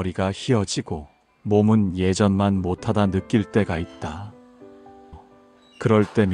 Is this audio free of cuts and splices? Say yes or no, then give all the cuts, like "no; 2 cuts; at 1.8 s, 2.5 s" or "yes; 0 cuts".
yes; 0 cuts